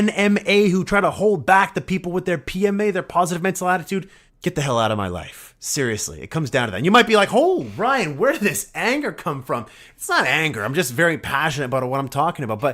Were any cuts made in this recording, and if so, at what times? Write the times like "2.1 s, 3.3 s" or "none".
4.2 s